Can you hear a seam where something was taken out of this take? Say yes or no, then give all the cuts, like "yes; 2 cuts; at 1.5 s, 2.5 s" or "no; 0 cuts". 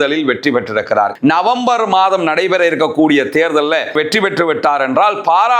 yes; 2 cuts; at 1.1 s, 3.9 s